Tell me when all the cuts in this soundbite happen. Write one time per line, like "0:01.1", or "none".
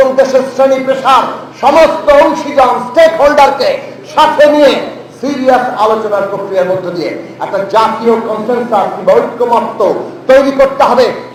none

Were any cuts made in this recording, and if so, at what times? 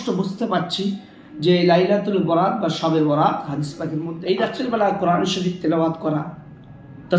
0:04.1

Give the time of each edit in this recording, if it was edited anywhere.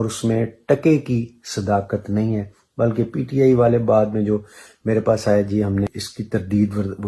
0:06.0

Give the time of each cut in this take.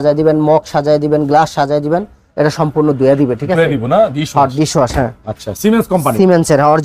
none

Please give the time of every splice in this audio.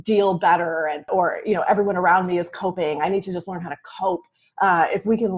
0:01.1

